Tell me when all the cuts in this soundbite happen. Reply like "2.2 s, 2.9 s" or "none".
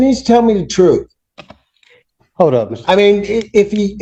none